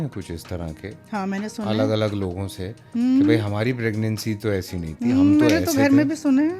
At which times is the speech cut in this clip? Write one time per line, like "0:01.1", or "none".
none